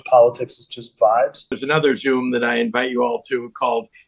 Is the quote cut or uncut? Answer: cut